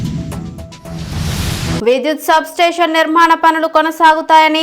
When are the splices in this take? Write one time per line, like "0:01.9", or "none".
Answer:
0:01.8